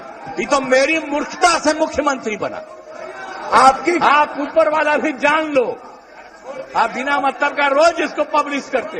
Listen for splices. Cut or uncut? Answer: cut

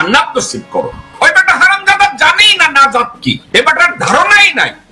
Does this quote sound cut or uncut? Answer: cut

